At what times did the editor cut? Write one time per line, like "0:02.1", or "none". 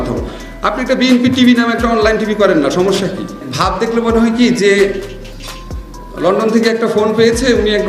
0:03.4